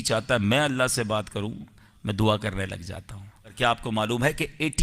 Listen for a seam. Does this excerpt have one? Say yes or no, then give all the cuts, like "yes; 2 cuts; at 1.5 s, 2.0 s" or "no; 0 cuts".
yes; 1 cut; at 3.6 s